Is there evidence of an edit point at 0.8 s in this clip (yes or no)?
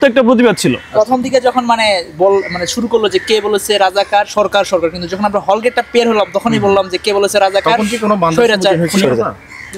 no